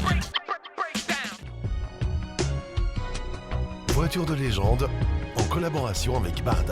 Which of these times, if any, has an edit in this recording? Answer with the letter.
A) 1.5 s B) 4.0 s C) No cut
A